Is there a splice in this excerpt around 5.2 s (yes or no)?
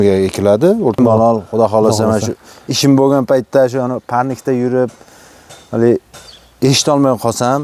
no